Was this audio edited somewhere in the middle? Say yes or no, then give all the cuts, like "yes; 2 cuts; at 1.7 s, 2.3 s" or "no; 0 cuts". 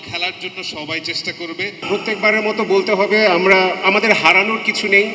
yes; 1 cut; at 1.7 s